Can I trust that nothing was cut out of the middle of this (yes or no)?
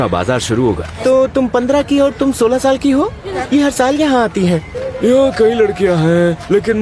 no